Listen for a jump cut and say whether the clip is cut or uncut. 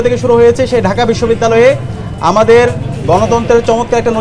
uncut